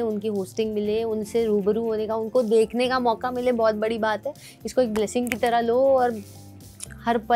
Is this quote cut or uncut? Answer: uncut